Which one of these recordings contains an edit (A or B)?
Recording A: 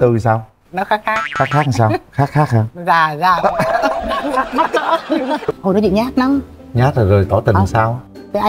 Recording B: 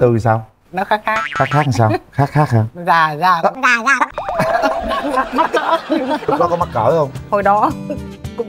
A